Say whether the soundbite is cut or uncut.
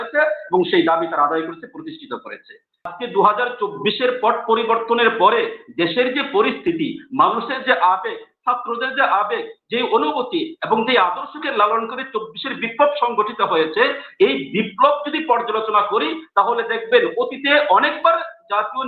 cut